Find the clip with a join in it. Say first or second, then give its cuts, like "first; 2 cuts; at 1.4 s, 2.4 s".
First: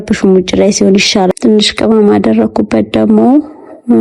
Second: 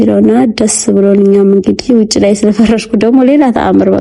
first; 1 cut; at 1.3 s